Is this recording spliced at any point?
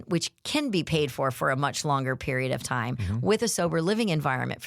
no; 0 cuts

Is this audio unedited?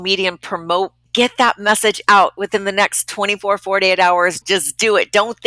no; 2 cuts; at 1.1 s, 4.4 s

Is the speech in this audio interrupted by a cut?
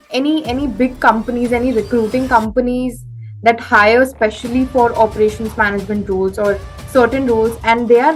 no; 0 cuts

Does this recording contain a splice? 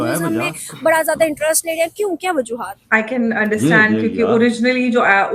yes; 1 cut; at 2.4 s

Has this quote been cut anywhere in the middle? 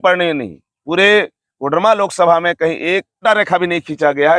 yes; 1 cut; at 3.2 s

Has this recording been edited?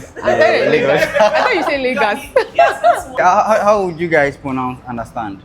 yes; 1 cut; at 3.1 s

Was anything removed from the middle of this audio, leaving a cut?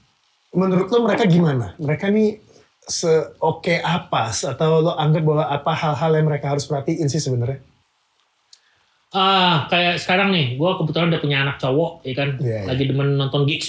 no; 0 cuts

